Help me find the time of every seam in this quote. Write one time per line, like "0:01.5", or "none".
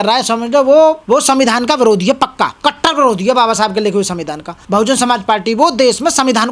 0:01.0
0:02.5
0:04.6

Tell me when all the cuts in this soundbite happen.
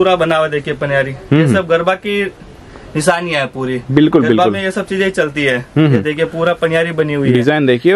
none

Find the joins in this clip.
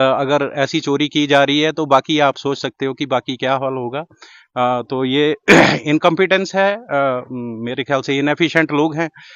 none

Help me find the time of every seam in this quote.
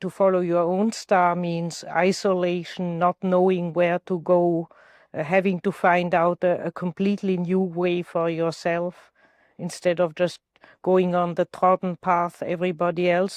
none

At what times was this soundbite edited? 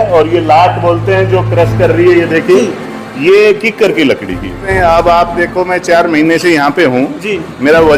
0:04.7

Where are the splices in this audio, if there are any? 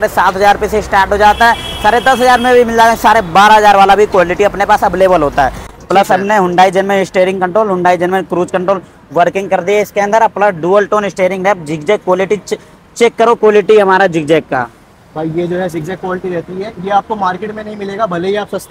none

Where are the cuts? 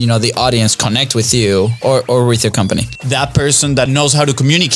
0:03.0
0:03.9

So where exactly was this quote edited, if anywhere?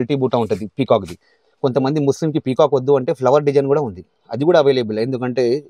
none

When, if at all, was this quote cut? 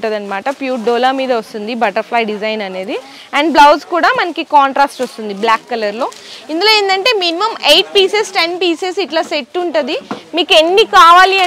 none

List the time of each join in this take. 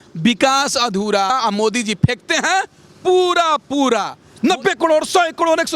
0:01.3
0:04.2

